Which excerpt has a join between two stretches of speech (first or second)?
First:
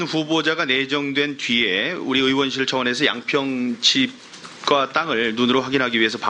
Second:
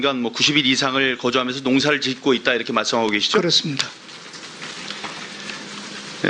second